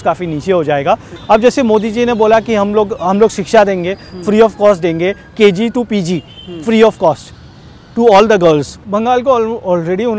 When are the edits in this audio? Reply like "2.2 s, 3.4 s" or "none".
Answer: 1.1 s, 8.8 s